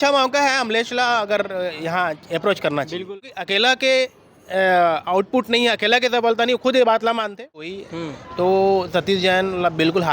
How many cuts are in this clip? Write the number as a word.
two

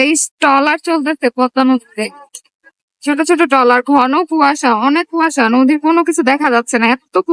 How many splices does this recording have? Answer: zero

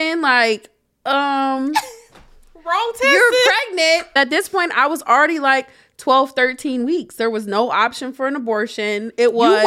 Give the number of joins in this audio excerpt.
one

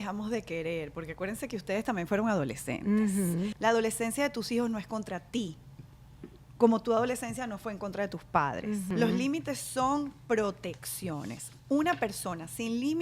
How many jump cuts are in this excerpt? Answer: two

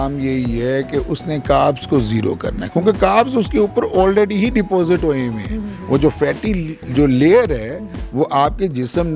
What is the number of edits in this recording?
zero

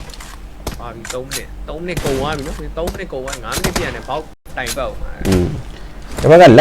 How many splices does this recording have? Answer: one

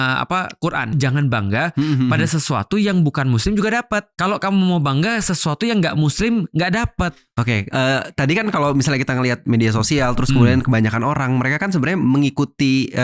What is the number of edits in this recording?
three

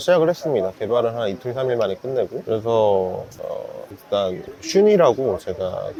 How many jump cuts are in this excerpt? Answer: zero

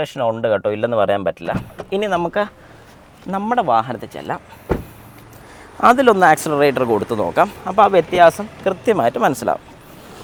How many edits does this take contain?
zero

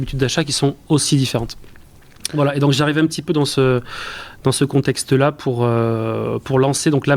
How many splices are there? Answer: zero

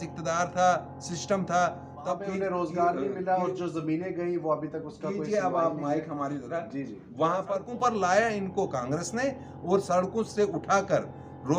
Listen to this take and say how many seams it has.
two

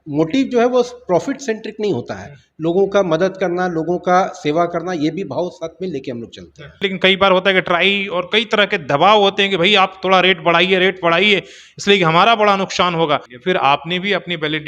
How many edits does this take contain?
two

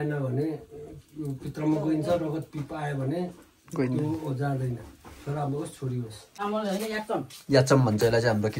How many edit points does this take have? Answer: one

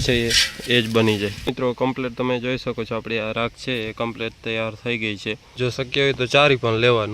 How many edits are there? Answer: two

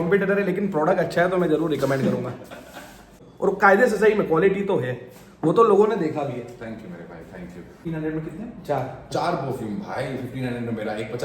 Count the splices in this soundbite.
two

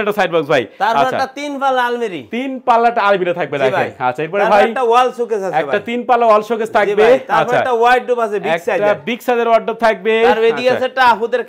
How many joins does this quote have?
zero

